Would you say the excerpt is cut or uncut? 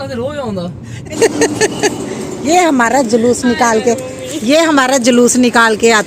cut